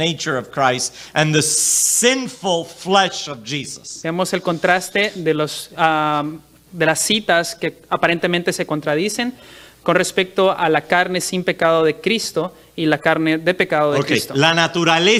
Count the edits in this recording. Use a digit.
0